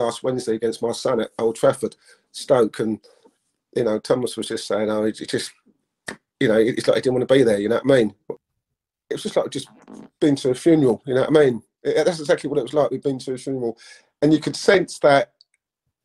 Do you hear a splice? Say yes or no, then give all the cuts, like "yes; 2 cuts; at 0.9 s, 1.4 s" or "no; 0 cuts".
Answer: yes; 1 cut; at 8.3 s